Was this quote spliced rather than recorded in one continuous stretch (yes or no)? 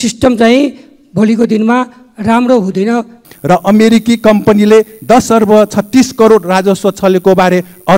yes